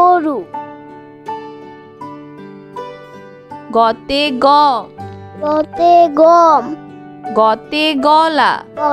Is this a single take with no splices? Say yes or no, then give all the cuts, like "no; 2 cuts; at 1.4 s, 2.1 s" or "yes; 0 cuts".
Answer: yes; 0 cuts